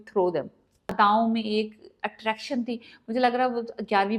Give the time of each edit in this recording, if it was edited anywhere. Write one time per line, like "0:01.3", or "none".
0:00.9